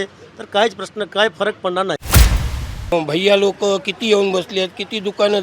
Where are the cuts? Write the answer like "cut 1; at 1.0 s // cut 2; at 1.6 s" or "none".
cut 1; at 2.4 s